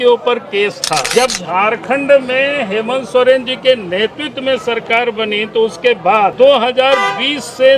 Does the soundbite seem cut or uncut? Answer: cut